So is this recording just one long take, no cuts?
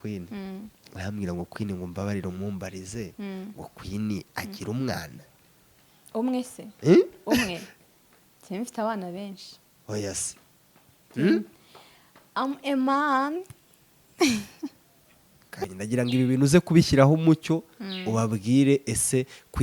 no; 1 cut; at 15.7 s

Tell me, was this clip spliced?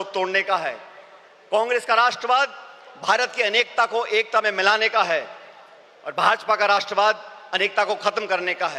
no; 0 cuts

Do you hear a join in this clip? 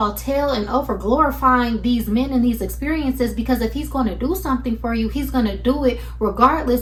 no; 0 cuts

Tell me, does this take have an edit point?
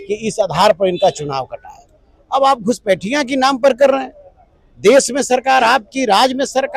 no; 0 cuts

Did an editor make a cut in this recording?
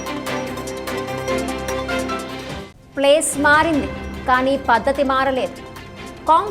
yes; 1 cut; at 2.6 s

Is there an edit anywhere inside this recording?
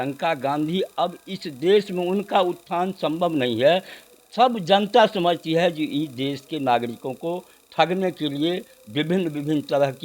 no; 0 cuts

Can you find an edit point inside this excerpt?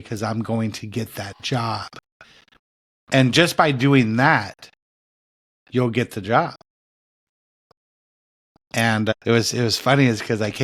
no; 0 cuts

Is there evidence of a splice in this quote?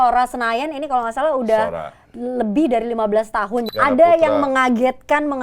yes; 1 cut; at 3.6 s

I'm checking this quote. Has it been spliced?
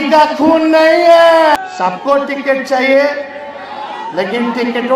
yes; 1 cut; at 1.6 s

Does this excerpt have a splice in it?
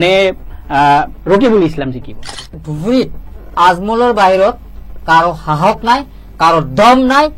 yes; 1 cut; at 2.7 s

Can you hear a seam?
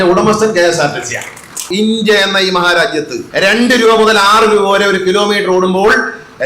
yes; 2 cuts; at 1.7 s, 3.2 s

